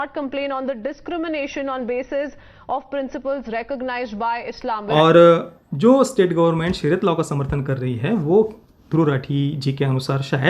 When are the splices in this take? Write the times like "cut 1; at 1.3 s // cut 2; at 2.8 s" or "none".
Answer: cut 1; at 4.9 s